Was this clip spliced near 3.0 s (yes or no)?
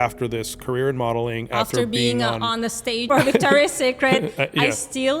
yes